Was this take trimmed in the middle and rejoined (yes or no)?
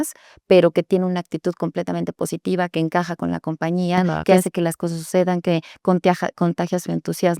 no